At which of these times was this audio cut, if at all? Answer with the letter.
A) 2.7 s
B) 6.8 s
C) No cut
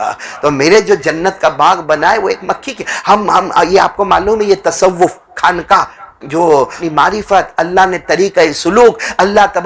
B